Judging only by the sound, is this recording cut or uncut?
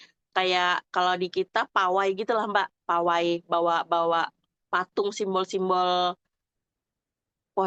uncut